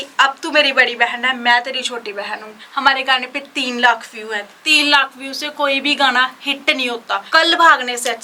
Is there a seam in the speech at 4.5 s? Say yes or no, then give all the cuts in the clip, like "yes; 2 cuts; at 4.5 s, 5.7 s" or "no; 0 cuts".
no; 2 cuts; at 2.6 s, 7.2 s